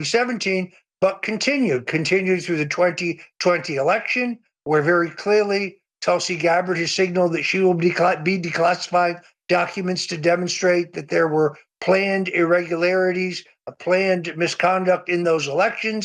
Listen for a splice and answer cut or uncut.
uncut